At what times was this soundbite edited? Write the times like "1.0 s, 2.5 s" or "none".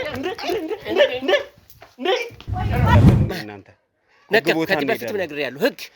3.0 s